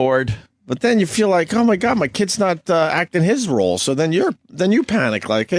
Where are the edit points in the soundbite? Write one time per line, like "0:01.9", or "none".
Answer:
0:03.2

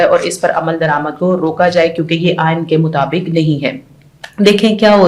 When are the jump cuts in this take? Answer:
none

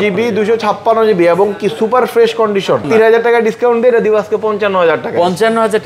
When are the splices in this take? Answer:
0:02.9

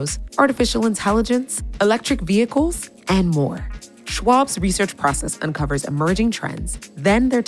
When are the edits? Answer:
none

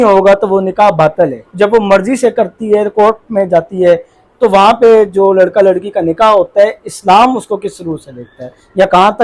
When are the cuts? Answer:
0:01.4

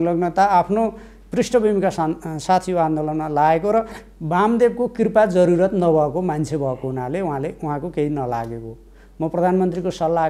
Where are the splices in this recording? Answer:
none

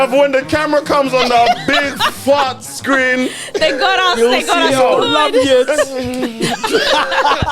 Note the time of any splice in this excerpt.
none

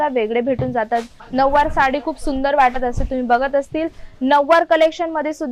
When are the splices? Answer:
0:01.2

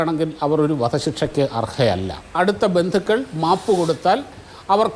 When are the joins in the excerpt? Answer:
0:02.4

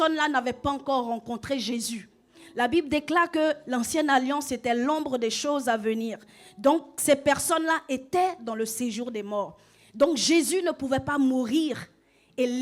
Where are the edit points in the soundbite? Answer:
none

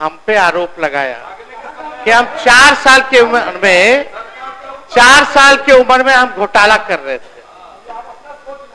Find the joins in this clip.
none

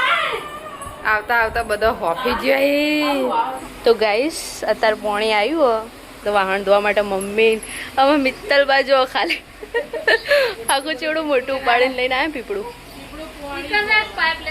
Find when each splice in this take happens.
0:03.6

